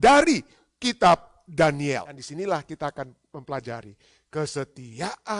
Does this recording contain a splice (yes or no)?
yes